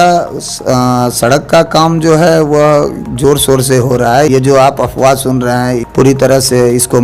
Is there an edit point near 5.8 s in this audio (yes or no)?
yes